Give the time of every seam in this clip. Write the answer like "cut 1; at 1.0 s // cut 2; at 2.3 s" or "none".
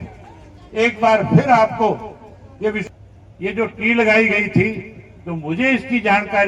cut 1; at 2.9 s